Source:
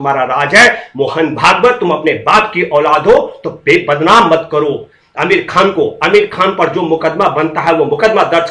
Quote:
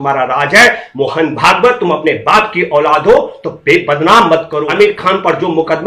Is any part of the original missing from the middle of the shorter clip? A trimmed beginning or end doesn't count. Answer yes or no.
yes